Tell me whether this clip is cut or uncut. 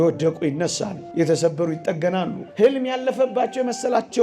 cut